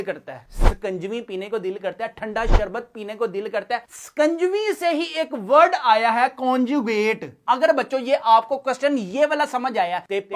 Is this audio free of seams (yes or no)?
no